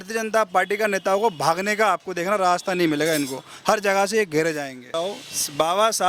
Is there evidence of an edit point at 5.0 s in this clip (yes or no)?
yes